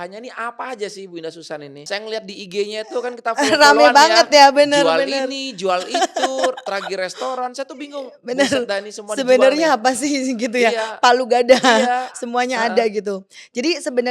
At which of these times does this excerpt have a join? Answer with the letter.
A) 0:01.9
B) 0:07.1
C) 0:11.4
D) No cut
A